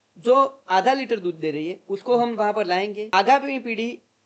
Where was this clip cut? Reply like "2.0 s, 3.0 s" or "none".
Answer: 3.0 s